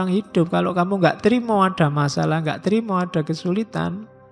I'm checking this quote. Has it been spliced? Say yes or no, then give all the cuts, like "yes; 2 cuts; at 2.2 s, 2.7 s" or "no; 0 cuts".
no; 0 cuts